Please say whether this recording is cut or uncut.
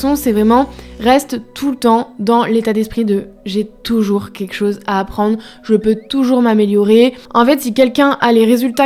uncut